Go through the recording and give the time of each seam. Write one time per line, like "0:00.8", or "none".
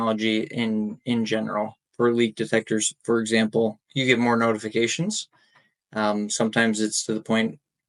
none